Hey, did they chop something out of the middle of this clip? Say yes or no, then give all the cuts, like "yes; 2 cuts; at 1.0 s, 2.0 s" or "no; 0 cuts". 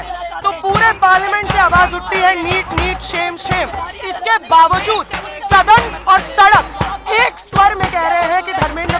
no; 0 cuts